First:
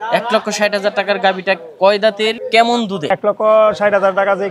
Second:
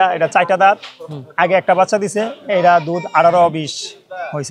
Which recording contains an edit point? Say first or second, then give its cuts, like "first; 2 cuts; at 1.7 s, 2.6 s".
first; 2 cuts; at 2.4 s, 3.1 s